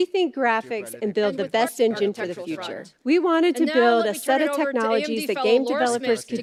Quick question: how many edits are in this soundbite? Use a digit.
0